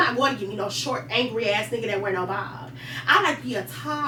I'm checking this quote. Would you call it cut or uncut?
uncut